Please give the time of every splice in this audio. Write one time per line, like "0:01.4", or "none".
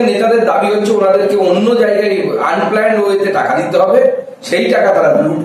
none